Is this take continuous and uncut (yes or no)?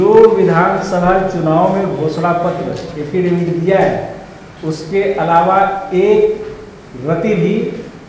yes